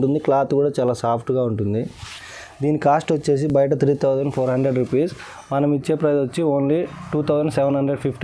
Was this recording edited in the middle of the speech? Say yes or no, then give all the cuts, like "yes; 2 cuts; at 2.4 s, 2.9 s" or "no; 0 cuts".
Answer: no; 0 cuts